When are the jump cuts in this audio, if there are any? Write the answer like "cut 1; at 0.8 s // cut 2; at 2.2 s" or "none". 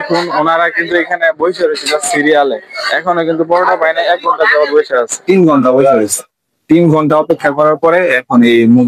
cut 1; at 5.3 s